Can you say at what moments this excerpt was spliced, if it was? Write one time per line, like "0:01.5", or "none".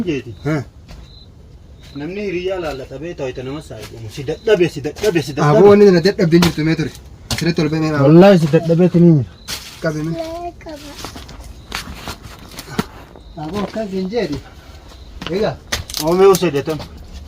0:11.0